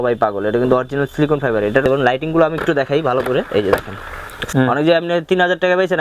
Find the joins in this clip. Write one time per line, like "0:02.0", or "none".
0:01.8
0:04.4